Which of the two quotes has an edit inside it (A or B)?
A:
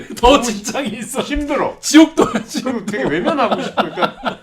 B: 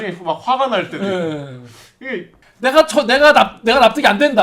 B